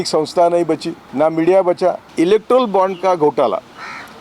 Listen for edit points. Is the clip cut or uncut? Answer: cut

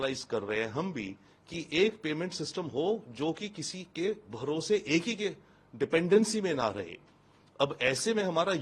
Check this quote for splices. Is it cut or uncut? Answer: uncut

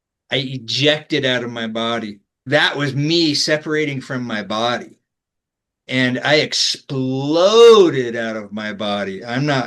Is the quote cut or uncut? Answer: cut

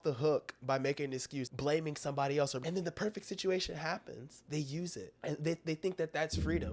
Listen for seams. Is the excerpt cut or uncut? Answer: cut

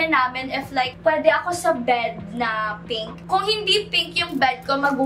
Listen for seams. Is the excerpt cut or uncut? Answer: cut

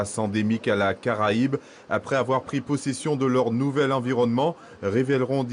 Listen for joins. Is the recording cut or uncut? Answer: uncut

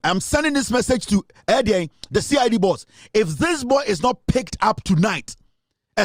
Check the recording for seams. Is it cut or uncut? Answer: uncut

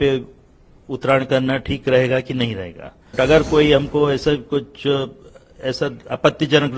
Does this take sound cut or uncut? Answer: cut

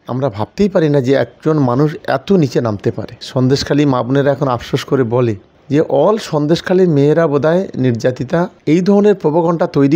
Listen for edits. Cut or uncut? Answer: cut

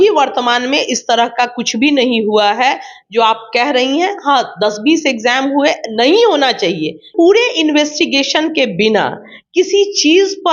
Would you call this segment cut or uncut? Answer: cut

